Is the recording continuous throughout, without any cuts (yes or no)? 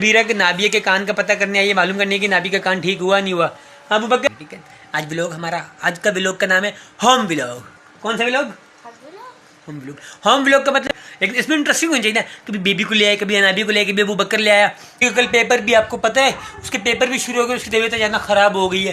no